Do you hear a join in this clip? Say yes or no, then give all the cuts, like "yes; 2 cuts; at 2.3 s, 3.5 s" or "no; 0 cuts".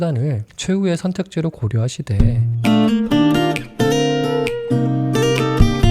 yes; 1 cut; at 2.1 s